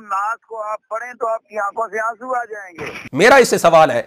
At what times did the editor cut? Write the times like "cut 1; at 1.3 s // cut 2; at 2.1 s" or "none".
cut 1; at 3.1 s

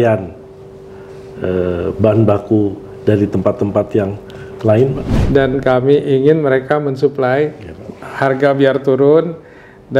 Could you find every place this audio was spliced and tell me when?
cut 1; at 5.1 s

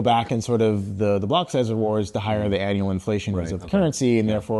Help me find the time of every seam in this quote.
none

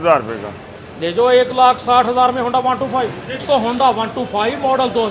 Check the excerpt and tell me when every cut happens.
none

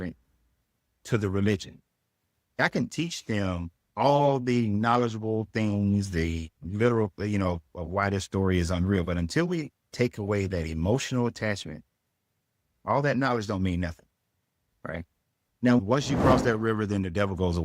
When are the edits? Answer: cut 1; at 15.8 s

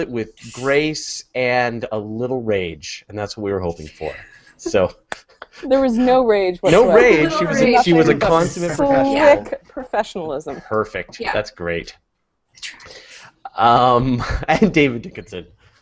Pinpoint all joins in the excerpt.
cut 1; at 5.0 s

